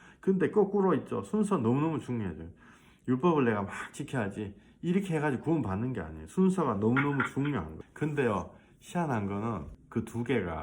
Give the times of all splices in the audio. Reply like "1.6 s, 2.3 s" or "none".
7.8 s, 9.8 s